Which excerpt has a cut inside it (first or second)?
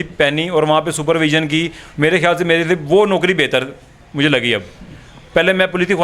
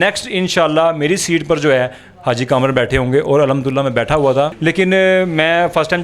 second